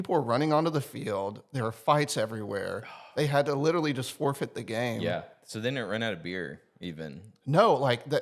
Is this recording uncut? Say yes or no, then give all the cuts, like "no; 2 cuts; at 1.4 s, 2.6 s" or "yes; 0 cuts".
yes; 0 cuts